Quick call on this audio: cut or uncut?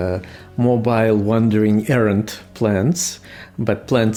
uncut